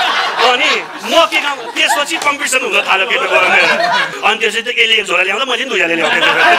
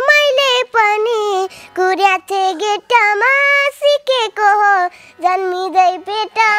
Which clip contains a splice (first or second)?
first